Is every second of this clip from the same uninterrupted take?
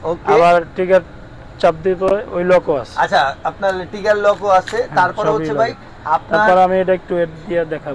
yes; 0 cuts

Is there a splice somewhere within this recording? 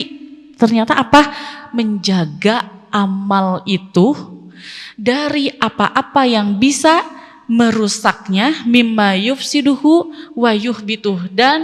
no; 0 cuts

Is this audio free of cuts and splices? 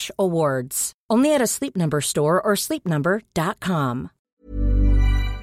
no; 1 cut; at 4.2 s

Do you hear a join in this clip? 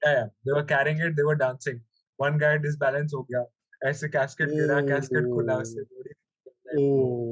no; 0 cuts

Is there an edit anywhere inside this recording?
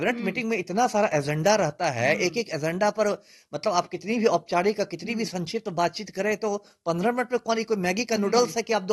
no; 0 cuts

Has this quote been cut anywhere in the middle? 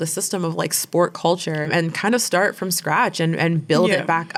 no; 0 cuts

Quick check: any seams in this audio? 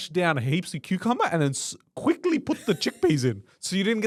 no; 0 cuts

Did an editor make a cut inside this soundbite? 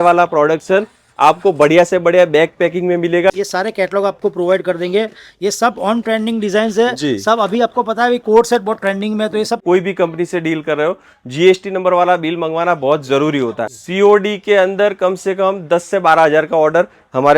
yes; 3 cuts; at 3.3 s, 9.6 s, 13.6 s

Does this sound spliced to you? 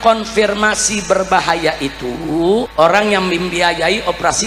yes; 1 cut; at 2.7 s

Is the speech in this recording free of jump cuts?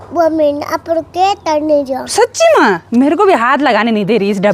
yes; 0 cuts

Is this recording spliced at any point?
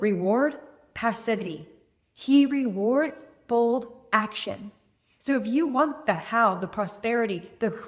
no; 0 cuts

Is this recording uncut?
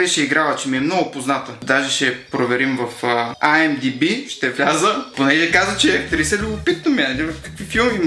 no; 1 cut; at 1.6 s

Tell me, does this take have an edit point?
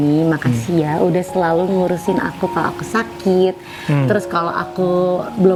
no; 0 cuts

